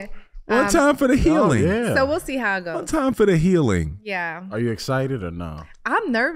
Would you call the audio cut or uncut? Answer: uncut